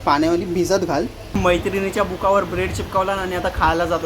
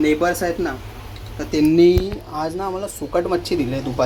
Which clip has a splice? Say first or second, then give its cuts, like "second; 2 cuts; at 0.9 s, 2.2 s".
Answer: first; 1 cut; at 1.3 s